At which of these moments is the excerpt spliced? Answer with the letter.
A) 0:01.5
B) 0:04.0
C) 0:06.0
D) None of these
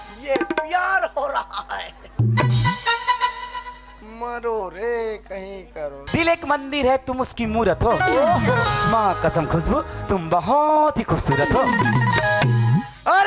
C